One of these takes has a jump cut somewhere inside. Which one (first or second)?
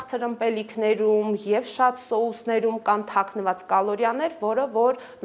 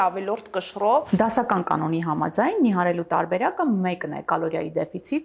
second